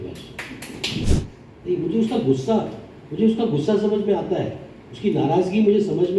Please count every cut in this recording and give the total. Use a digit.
1